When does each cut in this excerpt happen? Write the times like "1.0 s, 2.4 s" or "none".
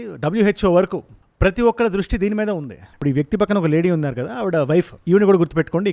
2.9 s